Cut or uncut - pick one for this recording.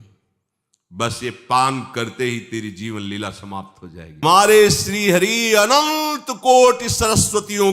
cut